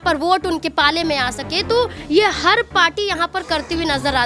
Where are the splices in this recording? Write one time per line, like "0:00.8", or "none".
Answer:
none